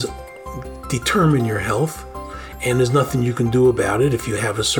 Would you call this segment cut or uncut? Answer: uncut